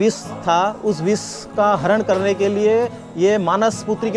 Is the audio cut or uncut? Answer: uncut